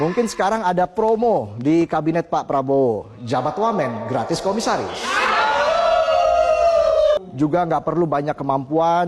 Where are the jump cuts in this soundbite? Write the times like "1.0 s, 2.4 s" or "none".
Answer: 7.2 s